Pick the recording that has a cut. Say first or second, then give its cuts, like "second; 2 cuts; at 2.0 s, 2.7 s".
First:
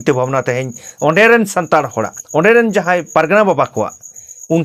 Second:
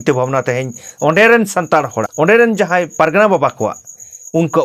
second; 1 cut; at 2.0 s